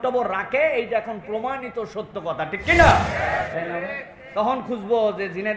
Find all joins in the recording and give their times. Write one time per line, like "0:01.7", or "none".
0:03.1